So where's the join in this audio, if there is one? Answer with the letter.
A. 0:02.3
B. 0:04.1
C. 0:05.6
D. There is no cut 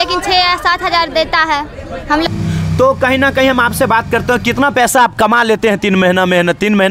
A